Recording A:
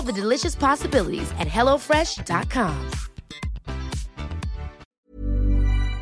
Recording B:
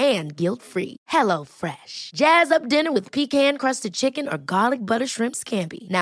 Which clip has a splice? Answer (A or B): A